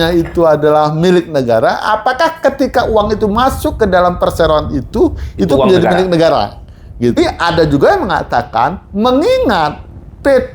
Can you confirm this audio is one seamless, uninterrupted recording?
no; 1 cut; at 7.2 s

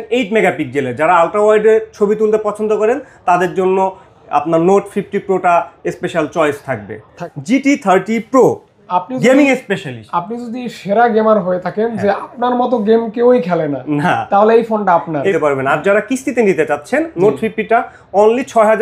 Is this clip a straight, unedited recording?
no; 2 cuts; at 7.3 s, 15.3 s

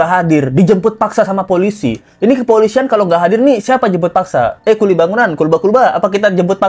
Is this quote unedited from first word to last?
yes; 0 cuts

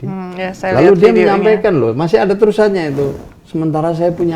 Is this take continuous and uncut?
yes; 0 cuts

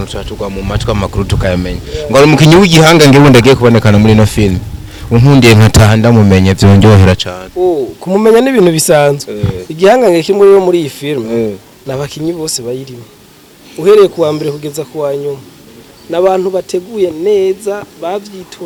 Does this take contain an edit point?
no; 0 cuts

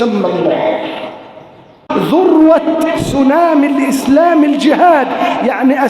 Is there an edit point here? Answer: yes; 1 cut; at 1.9 s

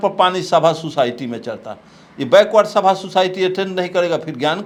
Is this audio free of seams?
yes; 0 cuts

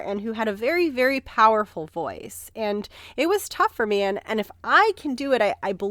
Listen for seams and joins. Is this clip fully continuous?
yes; 0 cuts

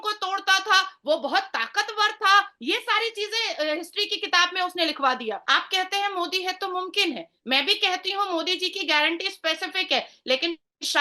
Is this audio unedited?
no; 1 cut; at 5.4 s

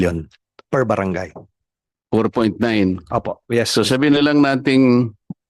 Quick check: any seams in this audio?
no; 0 cuts

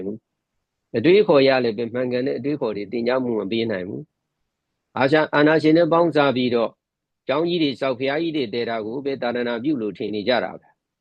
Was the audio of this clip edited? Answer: no; 0 cuts

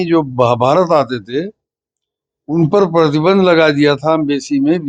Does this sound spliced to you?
no; 0 cuts

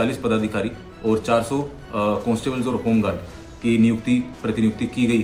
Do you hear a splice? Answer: no; 0 cuts

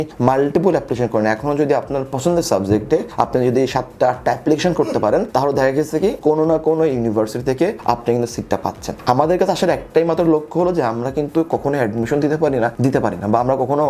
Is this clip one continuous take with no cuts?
yes; 0 cuts

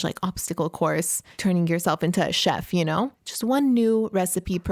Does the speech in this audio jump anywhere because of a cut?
yes; 2 cuts; at 1.2 s, 3.2 s

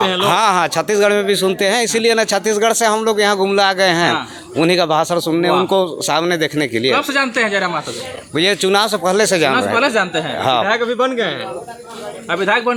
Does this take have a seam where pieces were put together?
no; 0 cuts

